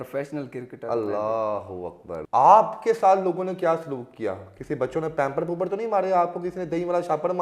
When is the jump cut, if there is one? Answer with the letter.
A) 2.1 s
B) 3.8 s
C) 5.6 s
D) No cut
A